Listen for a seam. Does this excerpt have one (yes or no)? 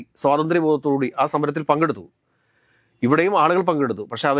no